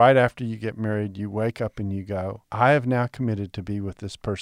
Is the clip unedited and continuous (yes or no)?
no